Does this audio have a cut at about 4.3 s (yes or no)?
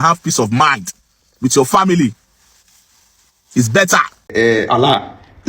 yes